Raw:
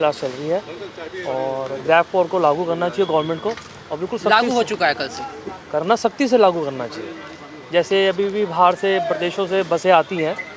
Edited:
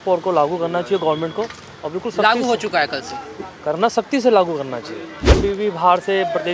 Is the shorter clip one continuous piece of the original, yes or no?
no